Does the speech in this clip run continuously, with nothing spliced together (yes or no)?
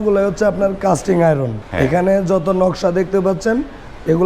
no